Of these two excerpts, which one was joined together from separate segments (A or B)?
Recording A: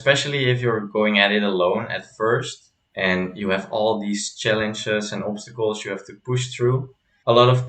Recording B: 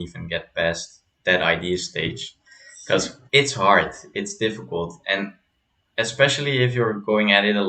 B